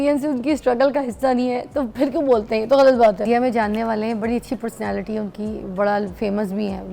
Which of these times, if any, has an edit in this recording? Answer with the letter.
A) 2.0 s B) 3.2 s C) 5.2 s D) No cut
B